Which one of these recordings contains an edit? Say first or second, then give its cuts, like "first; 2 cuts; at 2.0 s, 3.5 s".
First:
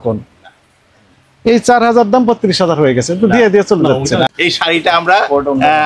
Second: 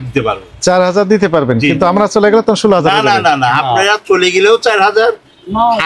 first; 1 cut; at 4.3 s